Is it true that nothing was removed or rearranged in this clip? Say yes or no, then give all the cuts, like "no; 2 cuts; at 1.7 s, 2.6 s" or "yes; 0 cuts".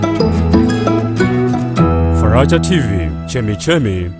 no; 1 cut; at 1.6 s